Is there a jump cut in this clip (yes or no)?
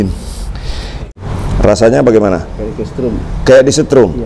yes